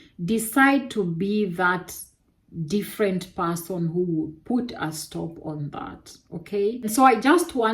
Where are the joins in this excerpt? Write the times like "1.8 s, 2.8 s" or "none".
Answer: 6.8 s